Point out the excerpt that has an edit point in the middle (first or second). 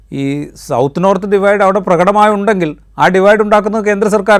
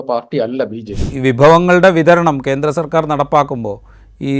second